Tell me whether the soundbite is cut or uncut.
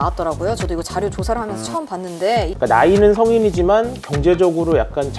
cut